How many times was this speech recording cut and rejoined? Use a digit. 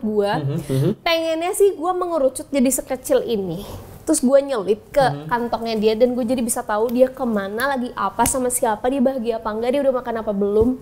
0